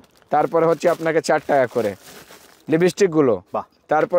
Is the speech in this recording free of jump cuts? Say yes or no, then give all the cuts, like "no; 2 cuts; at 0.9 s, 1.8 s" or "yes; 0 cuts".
yes; 0 cuts